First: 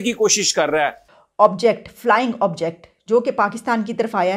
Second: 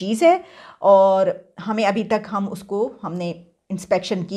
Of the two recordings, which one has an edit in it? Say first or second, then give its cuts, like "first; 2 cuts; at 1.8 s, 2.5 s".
first; 1 cut; at 1.0 s